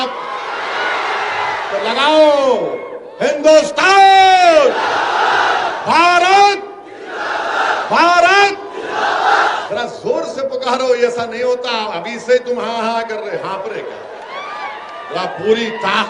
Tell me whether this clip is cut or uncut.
uncut